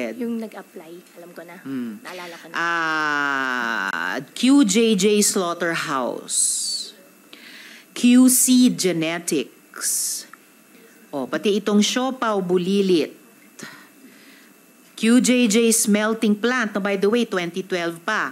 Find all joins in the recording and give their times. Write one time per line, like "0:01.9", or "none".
none